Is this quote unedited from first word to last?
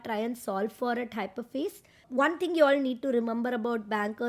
no; 1 cut; at 2.0 s

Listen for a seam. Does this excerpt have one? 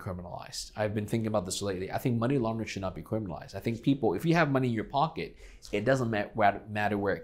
no; 0 cuts

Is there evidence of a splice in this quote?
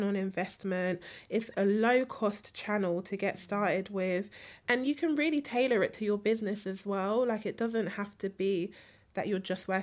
yes; 1 cut; at 4.6 s

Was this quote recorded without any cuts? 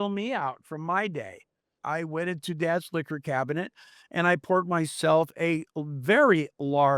no; 1 cut; at 1.8 s

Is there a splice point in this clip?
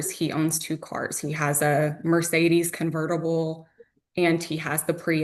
no; 0 cuts

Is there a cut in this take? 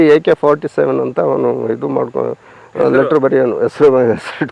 no; 0 cuts

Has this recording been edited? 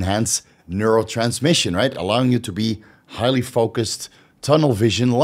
no; 0 cuts

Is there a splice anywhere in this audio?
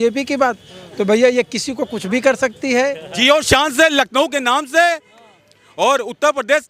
yes; 1 cut; at 3.1 s

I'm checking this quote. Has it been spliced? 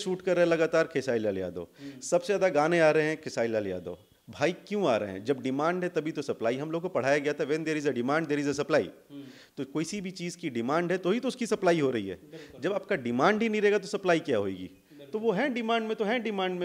no; 0 cuts

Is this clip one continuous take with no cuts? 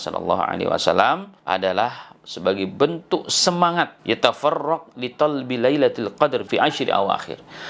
no; 3 cuts; at 1.3 s, 4.0 s, 6.5 s

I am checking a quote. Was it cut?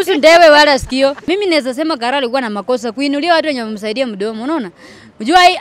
yes; 1 cut; at 1.3 s

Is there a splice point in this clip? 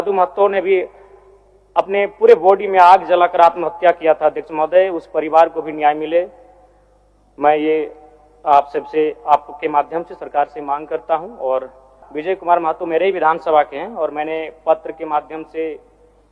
yes; 1 cut; at 12.0 s

